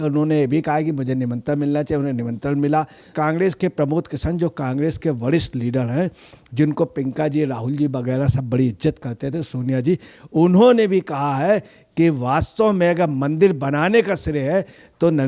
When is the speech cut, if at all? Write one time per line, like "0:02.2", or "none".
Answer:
0:03.0